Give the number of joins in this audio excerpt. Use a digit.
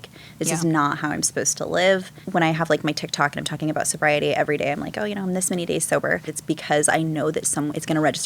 2